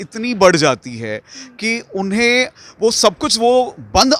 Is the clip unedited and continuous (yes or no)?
yes